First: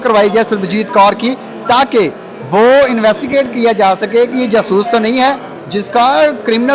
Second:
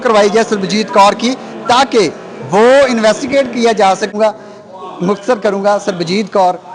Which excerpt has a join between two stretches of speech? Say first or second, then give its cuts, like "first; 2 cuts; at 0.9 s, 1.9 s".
second; 1 cut; at 4.1 s